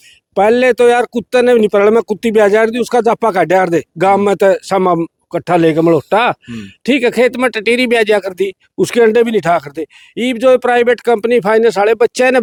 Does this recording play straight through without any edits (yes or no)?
yes